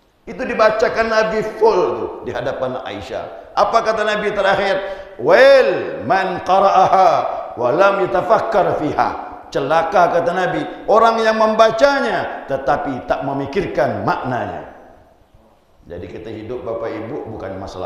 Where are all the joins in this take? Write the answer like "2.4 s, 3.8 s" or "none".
none

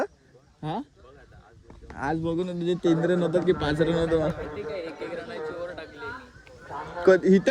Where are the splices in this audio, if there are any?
none

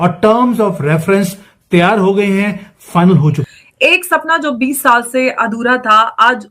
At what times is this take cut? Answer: 3.7 s

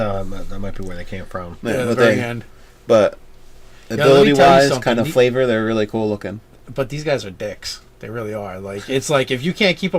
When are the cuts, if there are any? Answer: 5.3 s

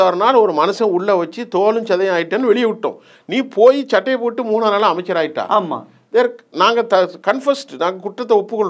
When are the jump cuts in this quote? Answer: none

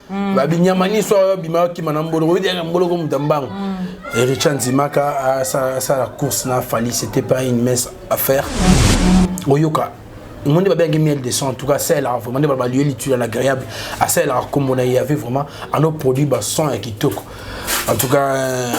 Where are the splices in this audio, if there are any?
8.7 s

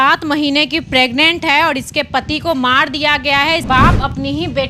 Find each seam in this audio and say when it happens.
3.6 s

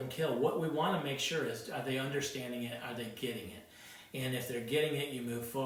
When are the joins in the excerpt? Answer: none

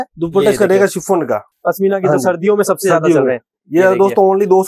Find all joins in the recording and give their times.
1.5 s

